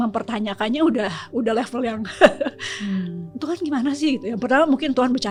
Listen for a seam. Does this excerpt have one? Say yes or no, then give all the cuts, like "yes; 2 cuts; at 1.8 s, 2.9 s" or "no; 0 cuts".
no; 0 cuts